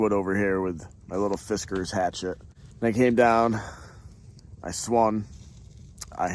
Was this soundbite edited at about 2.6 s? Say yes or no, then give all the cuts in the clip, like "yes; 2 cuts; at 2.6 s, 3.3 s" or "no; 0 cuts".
no; 0 cuts